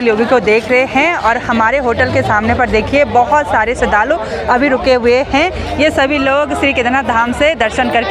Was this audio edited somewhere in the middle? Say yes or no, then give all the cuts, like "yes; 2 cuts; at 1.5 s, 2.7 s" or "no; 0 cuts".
no; 0 cuts